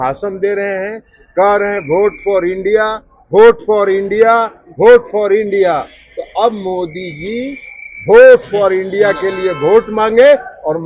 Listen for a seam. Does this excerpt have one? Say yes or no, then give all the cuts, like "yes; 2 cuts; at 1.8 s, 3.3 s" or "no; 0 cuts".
no; 0 cuts